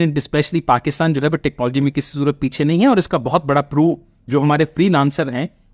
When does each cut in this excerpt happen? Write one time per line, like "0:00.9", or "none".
none